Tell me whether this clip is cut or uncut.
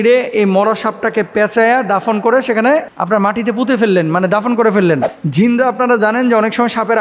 cut